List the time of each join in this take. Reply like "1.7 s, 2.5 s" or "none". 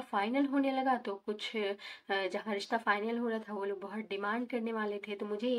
none